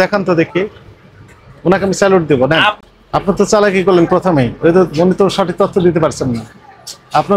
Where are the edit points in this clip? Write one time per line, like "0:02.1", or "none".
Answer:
0:02.8